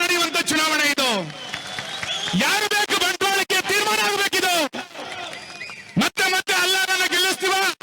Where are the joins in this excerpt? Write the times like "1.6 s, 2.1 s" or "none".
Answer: 1.3 s